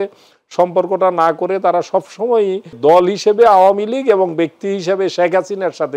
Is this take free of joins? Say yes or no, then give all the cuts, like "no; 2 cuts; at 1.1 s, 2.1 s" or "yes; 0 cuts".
no; 1 cut; at 2.8 s